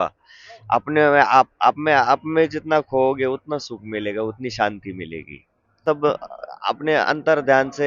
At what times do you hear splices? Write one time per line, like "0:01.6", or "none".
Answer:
0:05.8